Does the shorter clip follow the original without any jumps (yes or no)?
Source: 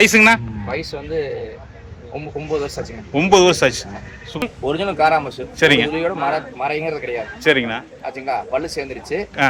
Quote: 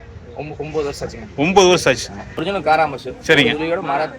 no